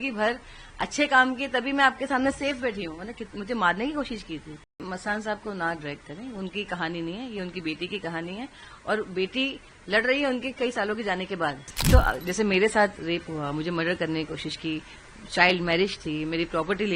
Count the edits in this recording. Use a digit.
2